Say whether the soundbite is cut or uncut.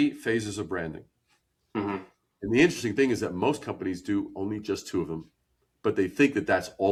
uncut